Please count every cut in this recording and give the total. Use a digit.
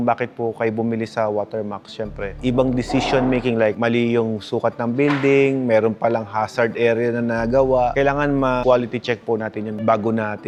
0